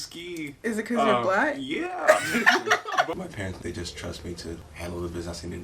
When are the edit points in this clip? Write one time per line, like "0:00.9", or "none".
0:03.1
0:04.7